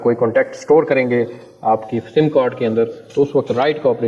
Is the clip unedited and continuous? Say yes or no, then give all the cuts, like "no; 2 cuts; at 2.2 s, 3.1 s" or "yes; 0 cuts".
yes; 0 cuts